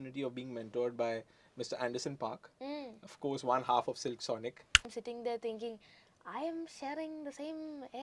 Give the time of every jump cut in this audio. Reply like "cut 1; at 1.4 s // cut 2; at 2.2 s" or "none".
cut 1; at 4.9 s